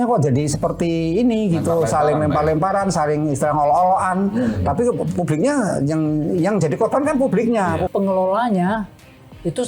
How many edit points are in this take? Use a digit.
1